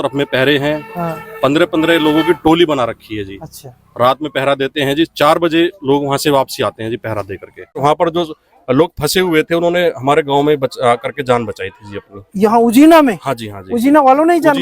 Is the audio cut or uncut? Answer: cut